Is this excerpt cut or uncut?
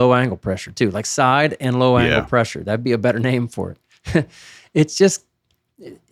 uncut